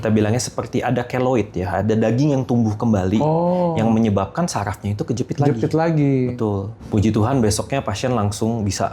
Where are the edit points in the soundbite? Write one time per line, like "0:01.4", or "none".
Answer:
0:06.7